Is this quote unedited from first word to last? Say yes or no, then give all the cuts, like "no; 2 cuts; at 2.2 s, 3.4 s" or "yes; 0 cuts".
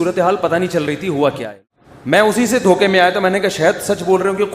no; 1 cut; at 1.5 s